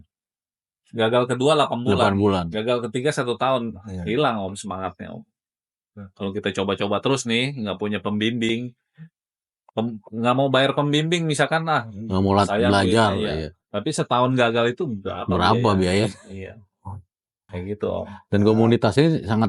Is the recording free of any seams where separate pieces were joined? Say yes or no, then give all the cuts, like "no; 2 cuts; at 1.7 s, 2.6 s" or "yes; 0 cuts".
yes; 0 cuts